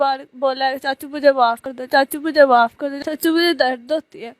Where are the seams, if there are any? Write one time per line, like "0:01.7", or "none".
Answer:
0:01.7
0:02.9